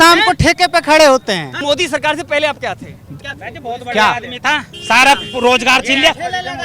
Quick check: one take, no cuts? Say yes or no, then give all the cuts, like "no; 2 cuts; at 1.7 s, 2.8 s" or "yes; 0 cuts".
no; 1 cut; at 1.6 s